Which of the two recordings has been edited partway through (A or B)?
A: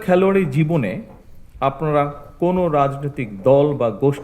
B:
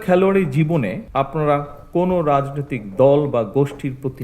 B